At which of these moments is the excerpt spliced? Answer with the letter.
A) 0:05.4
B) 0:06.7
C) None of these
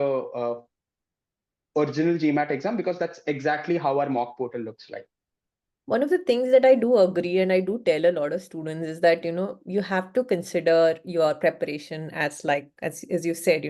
C